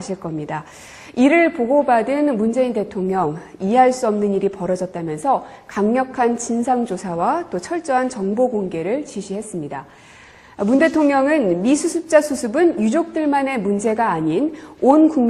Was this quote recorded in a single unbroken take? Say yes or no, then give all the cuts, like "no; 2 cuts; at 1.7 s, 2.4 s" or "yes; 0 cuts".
no; 1 cut; at 9.1 s